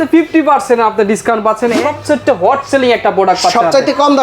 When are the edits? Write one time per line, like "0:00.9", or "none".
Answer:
0:01.7